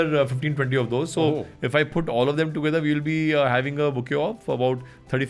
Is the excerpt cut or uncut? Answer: uncut